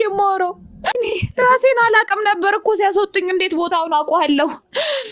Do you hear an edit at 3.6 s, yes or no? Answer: no